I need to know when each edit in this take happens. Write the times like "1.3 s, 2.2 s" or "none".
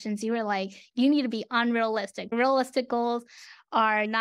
0.8 s, 2.2 s